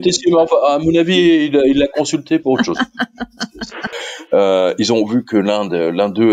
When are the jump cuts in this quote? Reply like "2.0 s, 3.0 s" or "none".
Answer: 3.9 s